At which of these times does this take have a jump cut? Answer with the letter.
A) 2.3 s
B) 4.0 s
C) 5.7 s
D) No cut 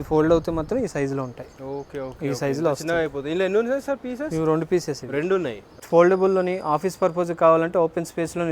C